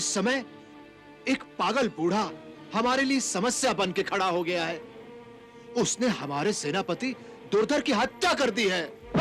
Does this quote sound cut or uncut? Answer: uncut